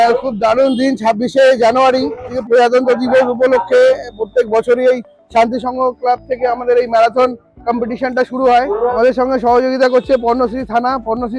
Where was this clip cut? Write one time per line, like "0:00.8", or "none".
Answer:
0:02.4
0:08.9